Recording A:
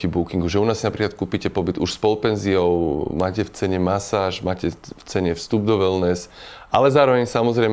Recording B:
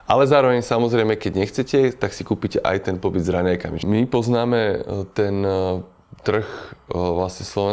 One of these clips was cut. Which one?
B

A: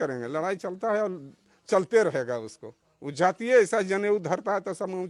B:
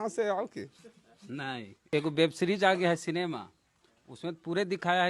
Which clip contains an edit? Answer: B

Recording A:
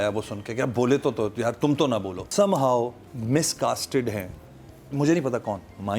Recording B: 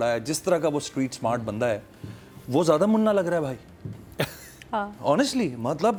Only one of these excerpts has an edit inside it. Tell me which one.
A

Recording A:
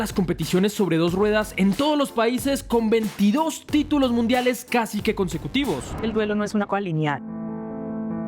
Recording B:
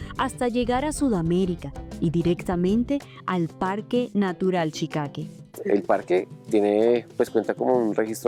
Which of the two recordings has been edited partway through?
A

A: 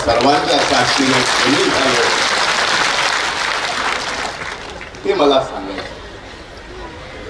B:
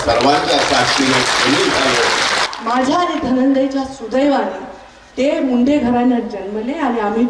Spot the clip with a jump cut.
B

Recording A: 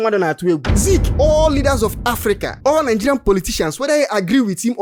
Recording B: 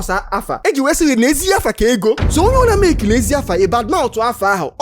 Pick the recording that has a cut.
B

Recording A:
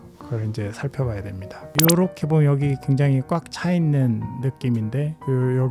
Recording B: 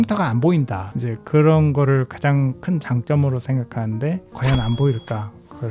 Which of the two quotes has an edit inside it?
A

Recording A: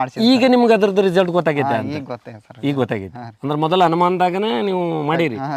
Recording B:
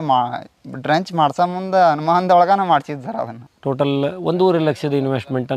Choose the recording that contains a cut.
B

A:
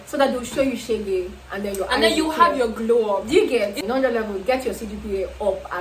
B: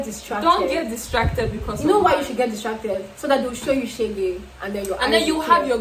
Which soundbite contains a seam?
A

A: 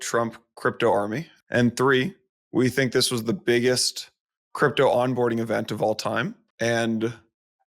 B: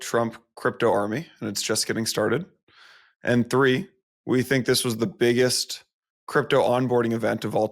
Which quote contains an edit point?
A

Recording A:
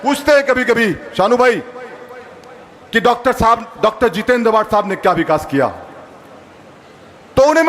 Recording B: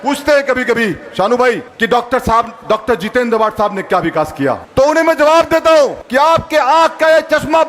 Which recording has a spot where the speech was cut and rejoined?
B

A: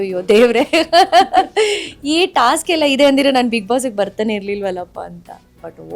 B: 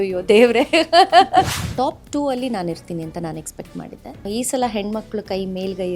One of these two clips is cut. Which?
B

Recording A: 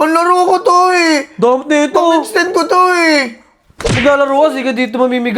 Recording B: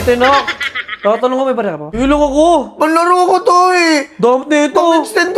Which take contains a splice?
B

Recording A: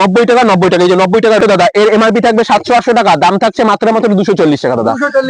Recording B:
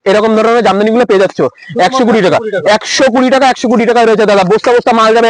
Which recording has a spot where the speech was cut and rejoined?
A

